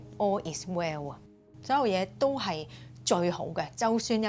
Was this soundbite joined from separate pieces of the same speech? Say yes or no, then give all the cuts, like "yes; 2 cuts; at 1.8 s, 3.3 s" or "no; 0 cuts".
yes; 1 cut; at 1.5 s